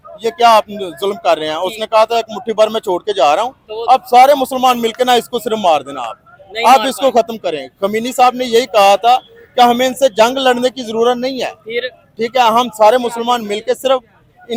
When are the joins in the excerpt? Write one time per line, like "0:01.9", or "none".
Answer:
none